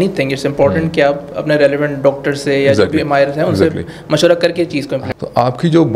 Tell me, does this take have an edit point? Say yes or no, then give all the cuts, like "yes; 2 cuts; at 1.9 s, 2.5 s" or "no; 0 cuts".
yes; 1 cut; at 5.0 s